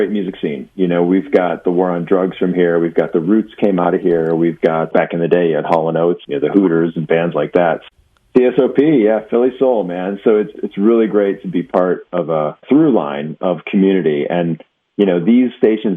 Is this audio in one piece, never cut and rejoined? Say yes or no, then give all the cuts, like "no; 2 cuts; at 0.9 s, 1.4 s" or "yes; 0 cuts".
no; 5 cuts; at 4.9 s, 6.2 s, 7.8 s, 10.5 s, 12.6 s